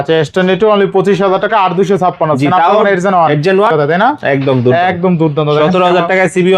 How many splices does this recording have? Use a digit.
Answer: 1